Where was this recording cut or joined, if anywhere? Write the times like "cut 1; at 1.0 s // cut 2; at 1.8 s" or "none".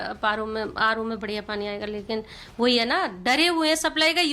none